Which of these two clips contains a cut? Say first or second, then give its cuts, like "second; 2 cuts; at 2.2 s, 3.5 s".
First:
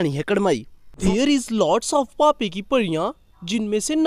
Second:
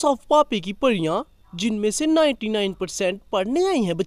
first; 1 cut; at 1.0 s